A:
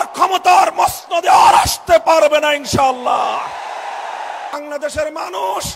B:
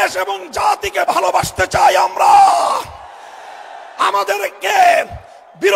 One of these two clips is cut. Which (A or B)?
A